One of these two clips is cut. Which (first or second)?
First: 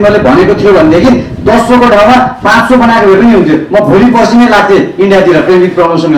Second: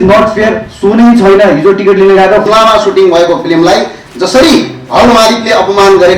second